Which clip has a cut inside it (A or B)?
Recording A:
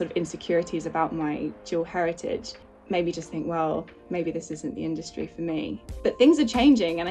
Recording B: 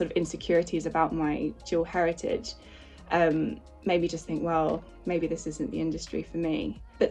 A